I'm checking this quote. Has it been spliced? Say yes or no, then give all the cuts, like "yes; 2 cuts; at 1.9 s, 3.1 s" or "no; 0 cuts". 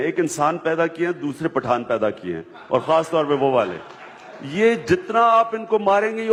no; 0 cuts